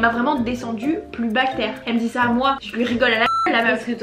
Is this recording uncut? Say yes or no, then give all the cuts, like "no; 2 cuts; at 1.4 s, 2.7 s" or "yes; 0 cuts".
no; 1 cut; at 1.8 s